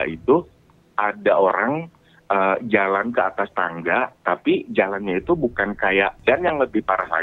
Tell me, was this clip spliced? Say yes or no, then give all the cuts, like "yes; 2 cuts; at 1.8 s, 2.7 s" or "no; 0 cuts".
yes; 1 cut; at 6.2 s